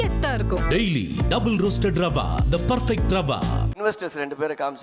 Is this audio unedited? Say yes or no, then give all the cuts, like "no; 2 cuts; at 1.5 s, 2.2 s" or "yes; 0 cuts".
no; 1 cut; at 3.8 s